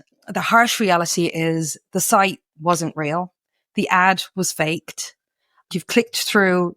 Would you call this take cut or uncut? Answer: cut